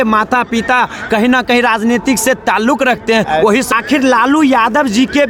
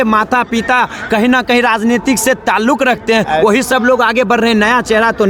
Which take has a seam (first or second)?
first